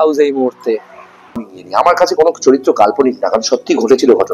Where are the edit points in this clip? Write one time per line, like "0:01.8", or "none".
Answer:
0:01.5